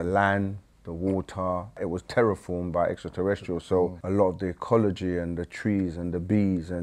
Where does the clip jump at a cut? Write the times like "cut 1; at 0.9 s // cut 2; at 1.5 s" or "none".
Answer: cut 1; at 1.8 s // cut 2; at 4.0 s